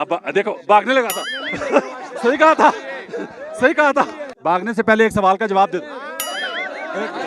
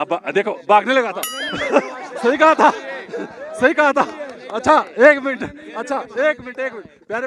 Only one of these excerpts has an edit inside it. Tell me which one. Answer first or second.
first